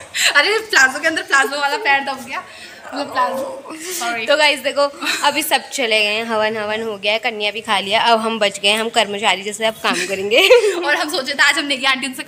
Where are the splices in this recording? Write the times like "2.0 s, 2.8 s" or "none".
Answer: none